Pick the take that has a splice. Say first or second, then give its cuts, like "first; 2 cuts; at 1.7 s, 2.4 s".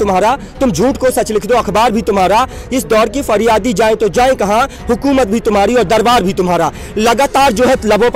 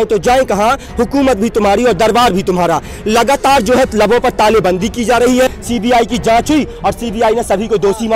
second; 1 cut; at 5.5 s